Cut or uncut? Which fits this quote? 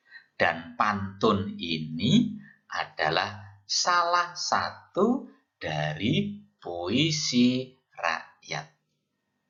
uncut